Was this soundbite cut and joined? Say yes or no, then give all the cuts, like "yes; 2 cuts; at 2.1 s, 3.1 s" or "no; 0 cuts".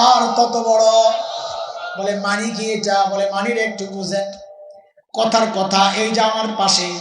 no; 0 cuts